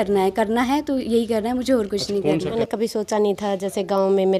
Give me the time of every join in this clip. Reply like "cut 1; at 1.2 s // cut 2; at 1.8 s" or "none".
cut 1; at 2.5 s